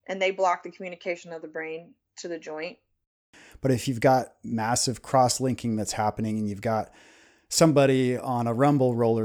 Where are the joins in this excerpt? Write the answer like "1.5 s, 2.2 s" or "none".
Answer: 3.3 s

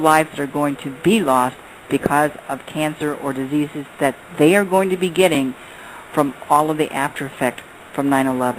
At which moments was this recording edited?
3.5 s

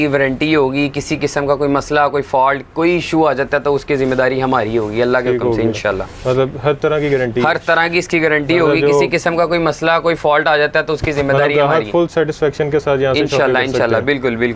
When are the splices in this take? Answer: none

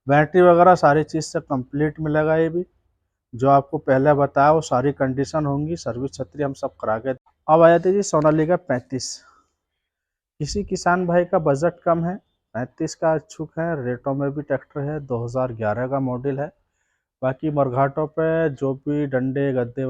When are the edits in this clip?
7.2 s

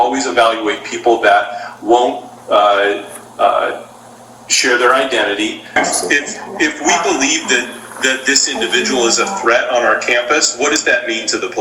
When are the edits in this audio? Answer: 5.7 s

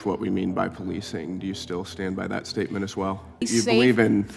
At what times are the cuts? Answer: 3.5 s

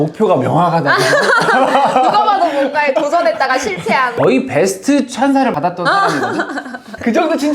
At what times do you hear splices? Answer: 4.1 s

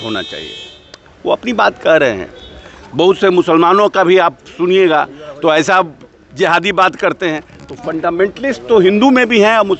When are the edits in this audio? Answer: none

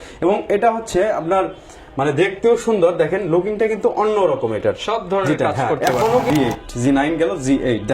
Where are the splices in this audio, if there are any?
6.3 s

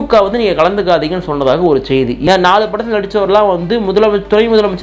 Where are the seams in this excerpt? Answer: 2.2 s

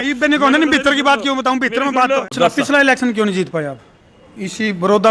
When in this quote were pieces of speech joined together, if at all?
2.3 s

